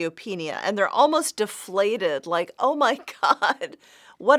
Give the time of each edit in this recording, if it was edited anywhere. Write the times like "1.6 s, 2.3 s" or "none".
none